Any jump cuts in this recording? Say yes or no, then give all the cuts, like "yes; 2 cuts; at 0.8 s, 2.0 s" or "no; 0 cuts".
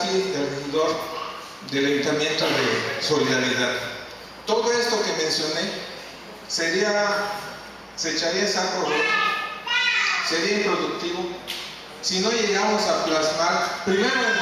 no; 0 cuts